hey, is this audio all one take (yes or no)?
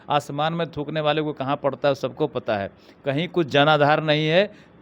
yes